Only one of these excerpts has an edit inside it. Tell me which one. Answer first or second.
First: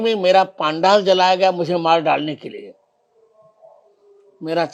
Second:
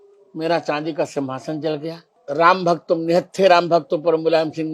second